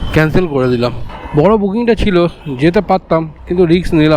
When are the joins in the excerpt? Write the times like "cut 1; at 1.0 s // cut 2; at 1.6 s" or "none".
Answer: cut 1; at 1.1 s